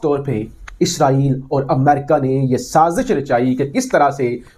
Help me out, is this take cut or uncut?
uncut